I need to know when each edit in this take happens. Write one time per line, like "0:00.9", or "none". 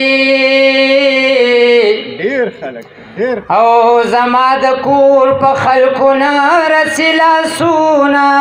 none